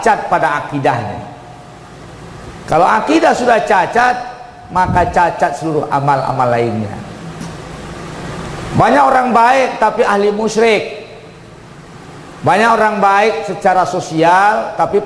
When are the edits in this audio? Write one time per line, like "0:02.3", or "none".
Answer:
none